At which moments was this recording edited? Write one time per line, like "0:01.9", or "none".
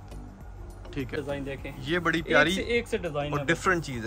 0:01.1